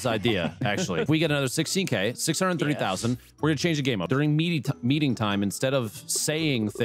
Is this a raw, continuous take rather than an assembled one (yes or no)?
no